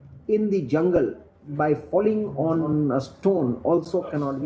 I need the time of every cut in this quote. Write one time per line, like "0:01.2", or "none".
0:02.7